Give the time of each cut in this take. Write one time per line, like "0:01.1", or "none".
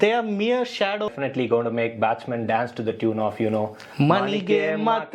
0:01.1